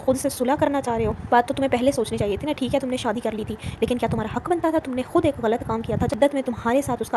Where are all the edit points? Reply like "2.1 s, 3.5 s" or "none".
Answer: 1.3 s, 6.1 s

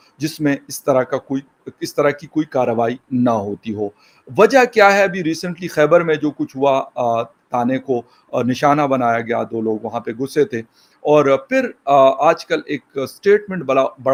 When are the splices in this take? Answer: none

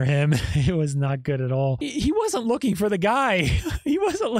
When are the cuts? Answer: 1.8 s

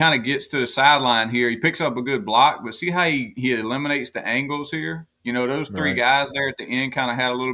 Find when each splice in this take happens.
none

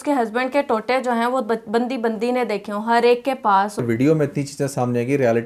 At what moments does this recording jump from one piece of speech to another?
3.8 s

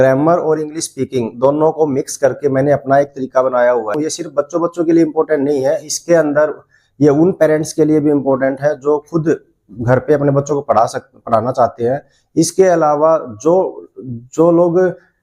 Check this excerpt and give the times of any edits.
4.0 s

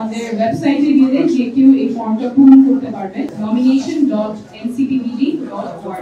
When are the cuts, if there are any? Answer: 3.3 s

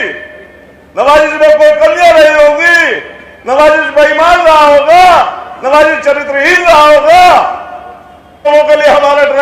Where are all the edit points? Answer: 8.5 s

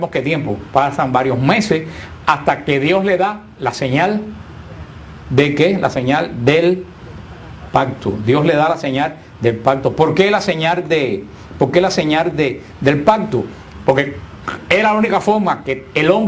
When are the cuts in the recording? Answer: 4.0 s

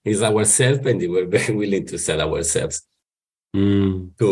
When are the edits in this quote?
none

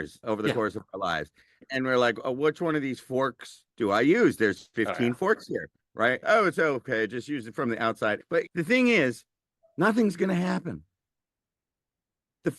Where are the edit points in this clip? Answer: 1.6 s, 6.2 s

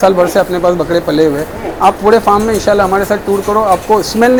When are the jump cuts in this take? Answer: none

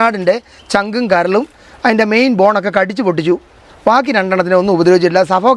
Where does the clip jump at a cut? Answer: none

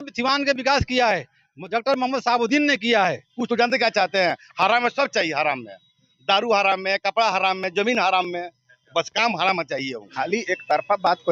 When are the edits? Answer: 3.3 s, 10.1 s

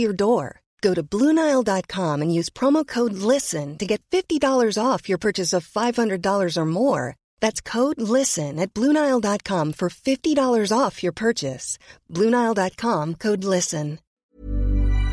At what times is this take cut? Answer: 14.2 s

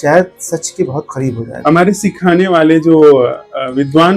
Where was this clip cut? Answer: 1.5 s

